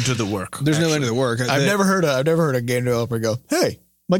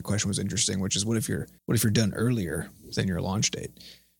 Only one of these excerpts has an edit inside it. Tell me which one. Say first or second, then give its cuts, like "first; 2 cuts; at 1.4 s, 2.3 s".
second; 1 cut; at 1.5 s